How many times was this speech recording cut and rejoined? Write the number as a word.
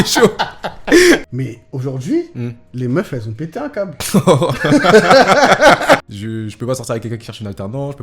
two